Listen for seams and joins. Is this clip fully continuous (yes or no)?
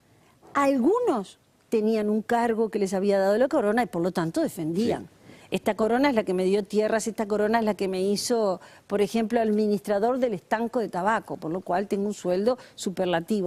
yes